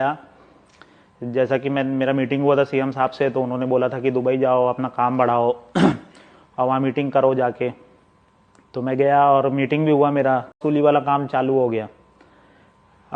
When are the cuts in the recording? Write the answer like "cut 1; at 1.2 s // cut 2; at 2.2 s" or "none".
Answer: cut 1; at 10.6 s